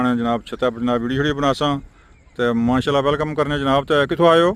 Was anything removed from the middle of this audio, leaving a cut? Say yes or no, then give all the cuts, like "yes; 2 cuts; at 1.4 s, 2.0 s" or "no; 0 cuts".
no; 0 cuts